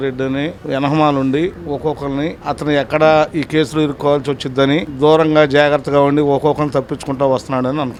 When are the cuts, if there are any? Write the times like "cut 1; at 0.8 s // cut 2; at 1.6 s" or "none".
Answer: none